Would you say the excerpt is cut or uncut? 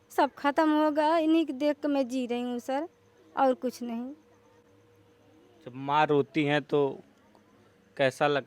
uncut